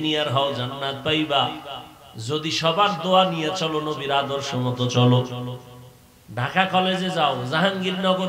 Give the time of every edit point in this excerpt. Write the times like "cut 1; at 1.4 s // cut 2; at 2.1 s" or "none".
none

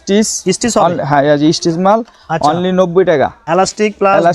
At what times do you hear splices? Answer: cut 1; at 3.4 s

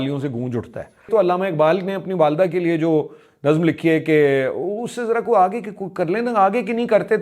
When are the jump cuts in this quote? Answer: cut 1; at 1.1 s

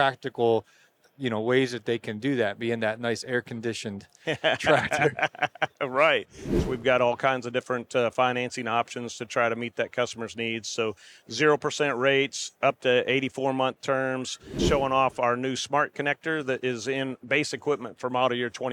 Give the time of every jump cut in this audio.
cut 1; at 6.6 s // cut 2; at 14.6 s

